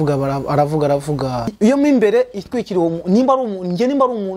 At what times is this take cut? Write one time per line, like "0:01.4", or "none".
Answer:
0:01.5